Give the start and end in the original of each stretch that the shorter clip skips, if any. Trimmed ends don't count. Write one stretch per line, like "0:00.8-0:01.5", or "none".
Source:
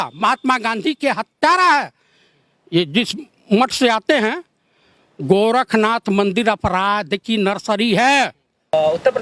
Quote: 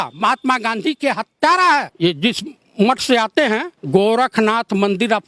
0:01.9-0:02.6
0:04.5-0:05.1